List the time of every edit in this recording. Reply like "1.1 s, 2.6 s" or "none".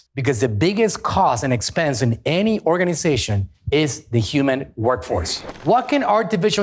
5.4 s